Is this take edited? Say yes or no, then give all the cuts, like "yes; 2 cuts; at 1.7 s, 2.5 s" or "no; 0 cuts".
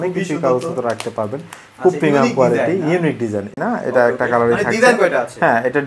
yes; 1 cut; at 3.5 s